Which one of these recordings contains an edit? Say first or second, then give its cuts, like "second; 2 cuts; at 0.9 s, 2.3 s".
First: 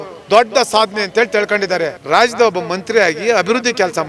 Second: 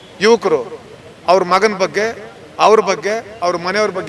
first; 1 cut; at 2.0 s